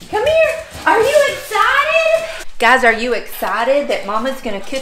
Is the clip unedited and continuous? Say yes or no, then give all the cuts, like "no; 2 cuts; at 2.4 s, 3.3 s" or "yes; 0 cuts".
no; 1 cut; at 2.4 s